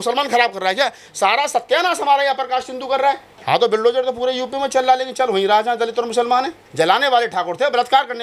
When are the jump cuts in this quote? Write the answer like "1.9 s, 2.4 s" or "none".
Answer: 3.3 s, 6.6 s

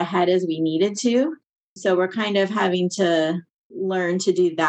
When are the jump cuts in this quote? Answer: 1.7 s

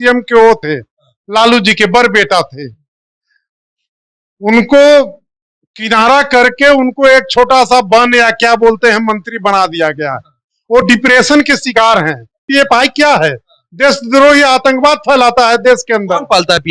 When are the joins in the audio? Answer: 12.4 s

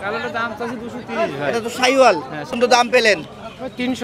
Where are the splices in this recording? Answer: 2.6 s

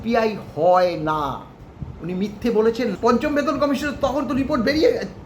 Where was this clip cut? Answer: 3.0 s

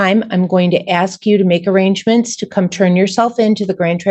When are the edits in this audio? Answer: none

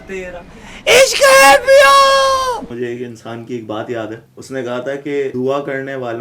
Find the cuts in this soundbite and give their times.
2.7 s, 4.3 s, 5.3 s

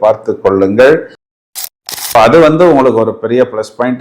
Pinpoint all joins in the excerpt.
1.5 s

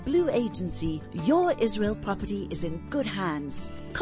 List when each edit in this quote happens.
none

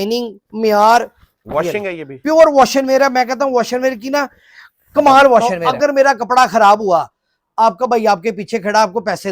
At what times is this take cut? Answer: 5.5 s

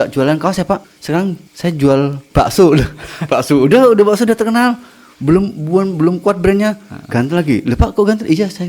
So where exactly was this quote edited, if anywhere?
1.1 s, 2.2 s

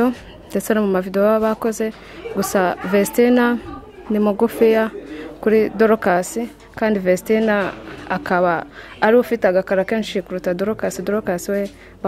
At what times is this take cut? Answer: none

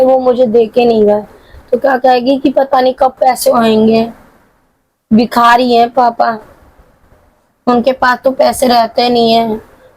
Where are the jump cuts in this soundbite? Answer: none

